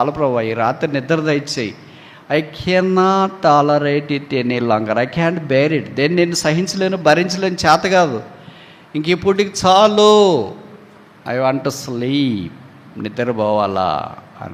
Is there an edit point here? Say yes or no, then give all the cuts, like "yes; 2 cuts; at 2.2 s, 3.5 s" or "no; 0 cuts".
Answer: no; 0 cuts